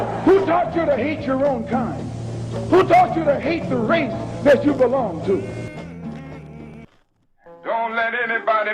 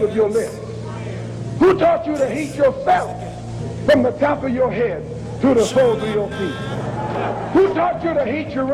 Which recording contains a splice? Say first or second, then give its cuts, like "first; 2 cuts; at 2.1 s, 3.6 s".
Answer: first; 1 cut; at 6.8 s